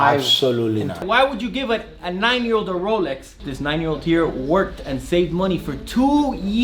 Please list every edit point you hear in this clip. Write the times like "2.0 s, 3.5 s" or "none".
1.0 s, 3.4 s